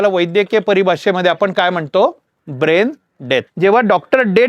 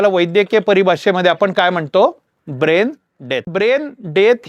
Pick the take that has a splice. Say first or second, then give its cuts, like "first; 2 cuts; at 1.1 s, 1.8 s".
second; 1 cut; at 3.5 s